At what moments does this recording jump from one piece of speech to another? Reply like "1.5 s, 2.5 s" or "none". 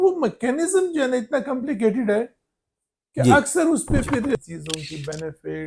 4.4 s